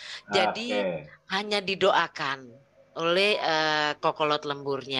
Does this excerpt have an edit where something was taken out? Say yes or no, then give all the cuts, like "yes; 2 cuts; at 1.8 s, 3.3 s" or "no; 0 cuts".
no; 0 cuts